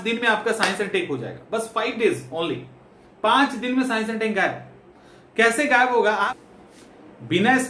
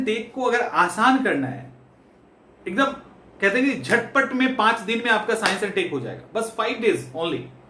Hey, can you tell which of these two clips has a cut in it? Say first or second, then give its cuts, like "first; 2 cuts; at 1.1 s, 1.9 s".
first; 1 cut; at 6.2 s